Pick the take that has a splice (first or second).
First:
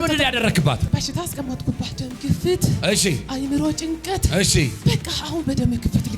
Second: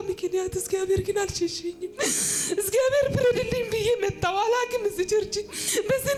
first